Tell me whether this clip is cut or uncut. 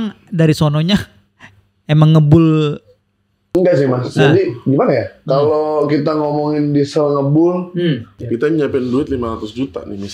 cut